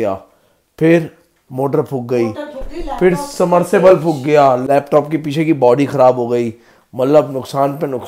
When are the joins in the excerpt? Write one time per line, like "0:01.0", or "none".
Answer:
none